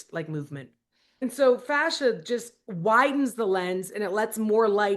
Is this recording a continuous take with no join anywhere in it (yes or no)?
no